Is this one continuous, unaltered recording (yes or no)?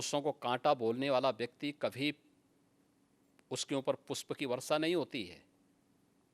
yes